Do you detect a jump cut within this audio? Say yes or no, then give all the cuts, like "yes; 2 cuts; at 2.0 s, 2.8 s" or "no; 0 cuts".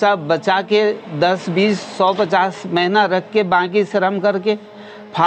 no; 0 cuts